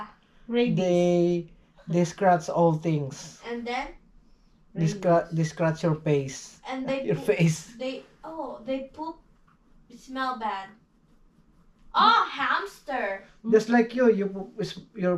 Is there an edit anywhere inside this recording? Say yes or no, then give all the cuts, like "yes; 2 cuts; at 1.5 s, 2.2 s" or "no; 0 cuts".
no; 0 cuts